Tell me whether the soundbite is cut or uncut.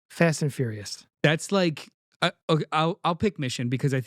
cut